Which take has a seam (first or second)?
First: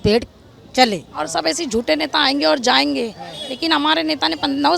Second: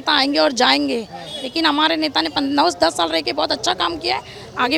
first